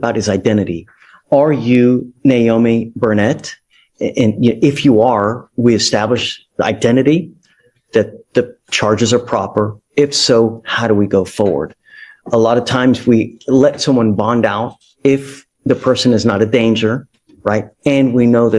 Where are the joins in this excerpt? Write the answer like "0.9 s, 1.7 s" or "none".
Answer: none